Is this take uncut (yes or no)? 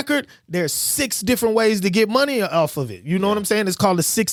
yes